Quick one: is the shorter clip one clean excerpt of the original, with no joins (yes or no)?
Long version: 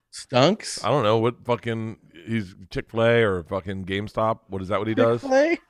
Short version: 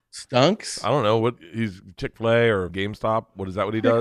no